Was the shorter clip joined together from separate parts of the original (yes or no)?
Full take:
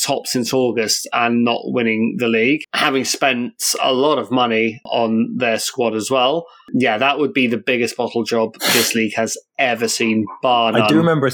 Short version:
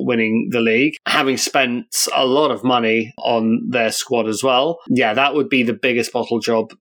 yes